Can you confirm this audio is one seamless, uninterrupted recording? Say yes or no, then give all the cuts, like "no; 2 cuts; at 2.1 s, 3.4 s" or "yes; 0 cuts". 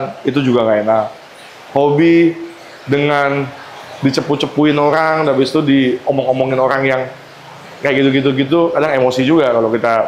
yes; 0 cuts